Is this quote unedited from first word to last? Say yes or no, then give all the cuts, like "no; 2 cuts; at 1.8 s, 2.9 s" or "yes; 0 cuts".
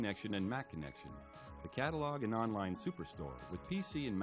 yes; 0 cuts